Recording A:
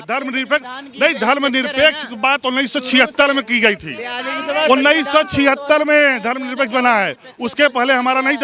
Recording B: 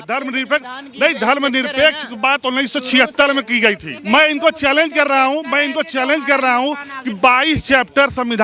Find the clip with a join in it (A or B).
B